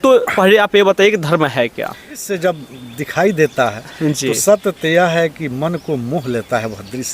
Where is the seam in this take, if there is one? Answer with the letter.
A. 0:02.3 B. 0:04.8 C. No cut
A